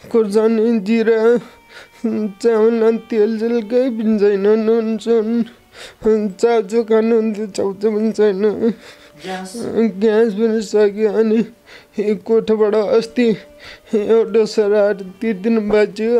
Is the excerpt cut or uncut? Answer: uncut